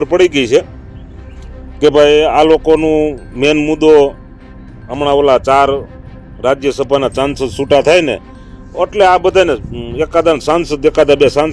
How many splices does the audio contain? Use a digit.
0